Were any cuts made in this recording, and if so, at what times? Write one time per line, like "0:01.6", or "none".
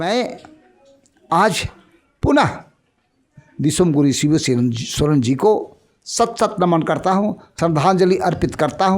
0:07.4